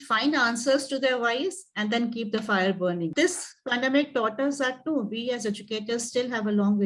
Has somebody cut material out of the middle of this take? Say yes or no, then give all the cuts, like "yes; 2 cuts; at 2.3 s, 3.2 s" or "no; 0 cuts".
yes; 1 cut; at 3.1 s